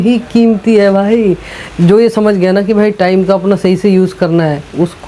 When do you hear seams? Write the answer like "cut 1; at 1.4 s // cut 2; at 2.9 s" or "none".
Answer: none